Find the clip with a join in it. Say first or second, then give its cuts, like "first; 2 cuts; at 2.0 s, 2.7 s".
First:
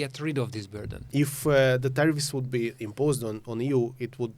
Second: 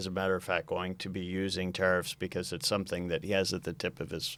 first; 1 cut; at 1.1 s